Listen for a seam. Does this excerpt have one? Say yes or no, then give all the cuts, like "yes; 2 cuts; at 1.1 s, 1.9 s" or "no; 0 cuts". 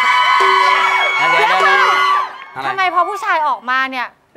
no; 0 cuts